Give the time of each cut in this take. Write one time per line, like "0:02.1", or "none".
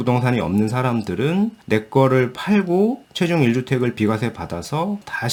none